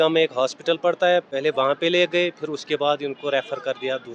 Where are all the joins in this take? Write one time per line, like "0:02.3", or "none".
none